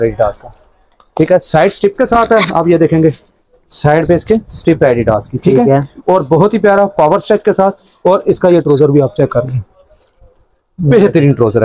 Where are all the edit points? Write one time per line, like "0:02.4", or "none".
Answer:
none